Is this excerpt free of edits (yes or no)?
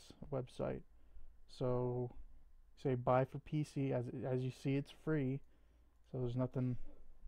yes